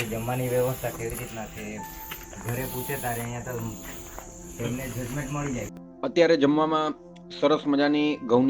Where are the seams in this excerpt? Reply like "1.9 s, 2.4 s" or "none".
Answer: 5.8 s